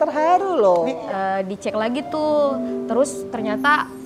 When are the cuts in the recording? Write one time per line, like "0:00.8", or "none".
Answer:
0:01.0